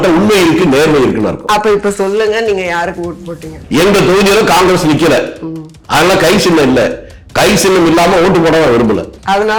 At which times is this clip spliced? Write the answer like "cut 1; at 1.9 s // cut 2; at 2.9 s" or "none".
none